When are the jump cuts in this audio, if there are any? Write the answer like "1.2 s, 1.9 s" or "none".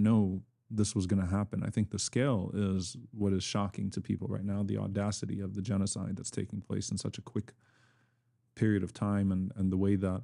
none